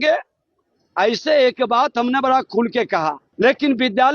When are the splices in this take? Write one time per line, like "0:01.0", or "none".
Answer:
0:03.2

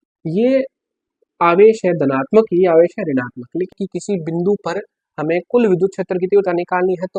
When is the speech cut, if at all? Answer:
0:03.7

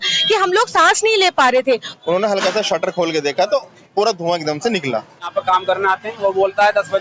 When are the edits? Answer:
0:01.9
0:05.3

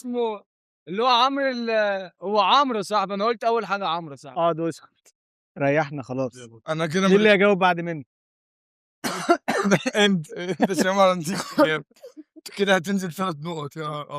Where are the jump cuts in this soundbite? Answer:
none

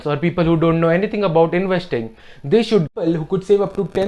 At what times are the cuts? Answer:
0:02.9

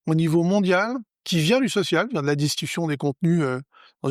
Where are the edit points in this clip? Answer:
0:01.1

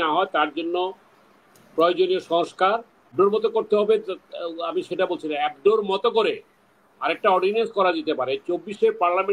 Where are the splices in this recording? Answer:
0:03.1

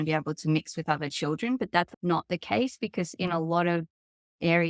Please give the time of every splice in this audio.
0:01.9

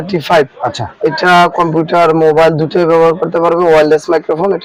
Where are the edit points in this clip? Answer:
none

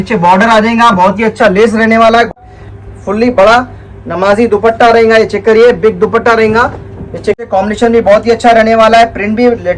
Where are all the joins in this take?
0:02.4
0:07.4

